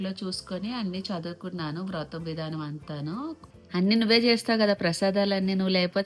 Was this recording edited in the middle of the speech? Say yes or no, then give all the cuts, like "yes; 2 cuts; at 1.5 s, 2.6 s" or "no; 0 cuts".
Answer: yes; 1 cut; at 3.5 s